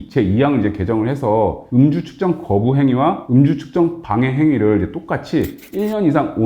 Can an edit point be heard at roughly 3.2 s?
yes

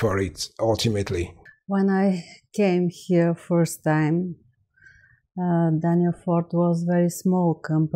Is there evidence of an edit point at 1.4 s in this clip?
yes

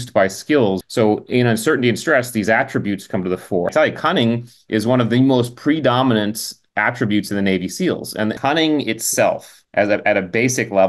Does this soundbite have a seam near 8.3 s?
yes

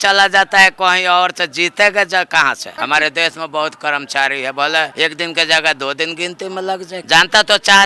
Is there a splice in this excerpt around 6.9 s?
yes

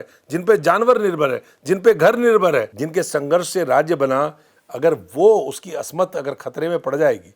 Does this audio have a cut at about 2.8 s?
yes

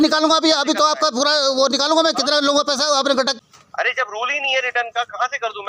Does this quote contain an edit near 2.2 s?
no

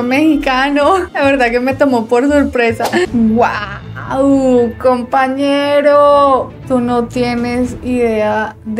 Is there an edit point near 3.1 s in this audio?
yes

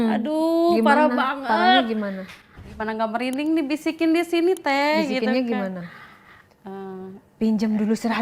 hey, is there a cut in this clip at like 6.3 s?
no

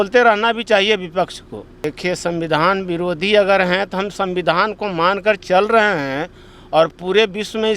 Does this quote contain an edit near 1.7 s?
yes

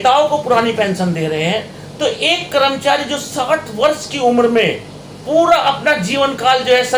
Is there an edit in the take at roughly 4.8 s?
no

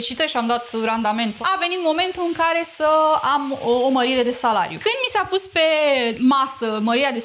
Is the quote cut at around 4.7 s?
yes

